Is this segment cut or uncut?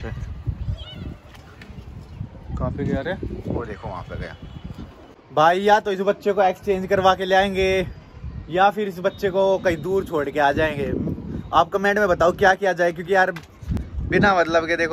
uncut